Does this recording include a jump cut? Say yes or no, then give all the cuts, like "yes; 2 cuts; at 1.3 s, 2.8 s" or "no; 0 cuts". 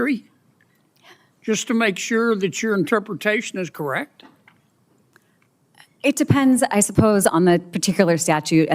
yes; 1 cut; at 5.2 s